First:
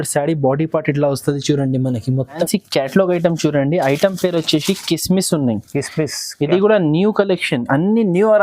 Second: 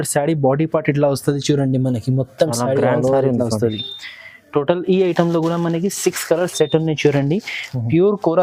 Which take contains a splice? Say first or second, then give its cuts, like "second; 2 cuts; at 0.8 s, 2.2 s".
first; 1 cut; at 2.4 s